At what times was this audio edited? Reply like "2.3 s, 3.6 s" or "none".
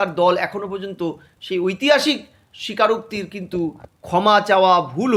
none